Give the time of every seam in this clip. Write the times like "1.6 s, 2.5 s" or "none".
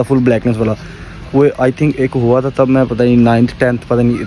none